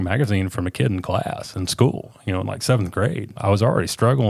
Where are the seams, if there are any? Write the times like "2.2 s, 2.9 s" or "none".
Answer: 3.3 s